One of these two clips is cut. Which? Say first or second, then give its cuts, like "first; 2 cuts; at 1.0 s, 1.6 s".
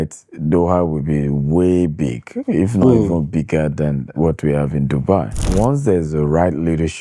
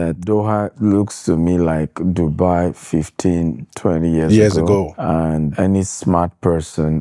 first; 1 cut; at 5.4 s